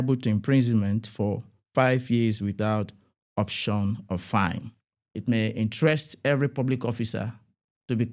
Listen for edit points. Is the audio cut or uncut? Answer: cut